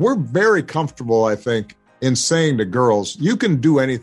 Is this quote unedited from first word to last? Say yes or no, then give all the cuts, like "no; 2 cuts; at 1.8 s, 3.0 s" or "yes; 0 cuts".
no; 1 cut; at 1.7 s